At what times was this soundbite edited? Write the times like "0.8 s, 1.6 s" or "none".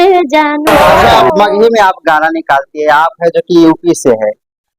1.0 s